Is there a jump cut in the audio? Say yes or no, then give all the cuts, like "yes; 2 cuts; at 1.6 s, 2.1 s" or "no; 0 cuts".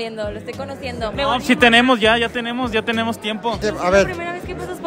no; 0 cuts